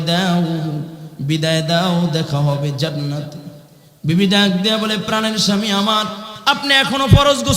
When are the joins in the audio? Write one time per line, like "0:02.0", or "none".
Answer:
0:06.3